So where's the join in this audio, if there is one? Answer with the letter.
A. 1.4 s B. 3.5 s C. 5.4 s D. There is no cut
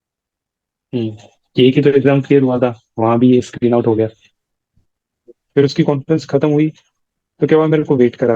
C